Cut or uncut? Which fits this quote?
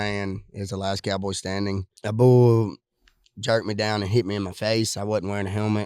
cut